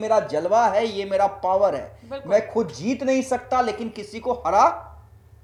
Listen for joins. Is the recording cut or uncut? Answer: uncut